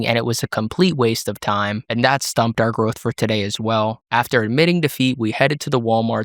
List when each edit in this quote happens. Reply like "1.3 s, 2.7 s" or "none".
none